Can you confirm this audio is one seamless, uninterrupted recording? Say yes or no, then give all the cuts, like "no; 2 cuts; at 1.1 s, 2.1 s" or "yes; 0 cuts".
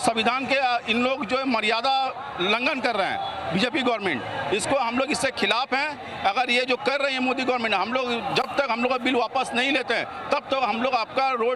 yes; 0 cuts